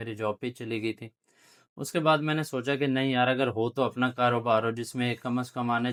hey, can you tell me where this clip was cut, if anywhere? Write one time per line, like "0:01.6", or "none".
none